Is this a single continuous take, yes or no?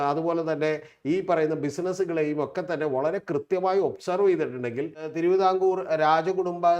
no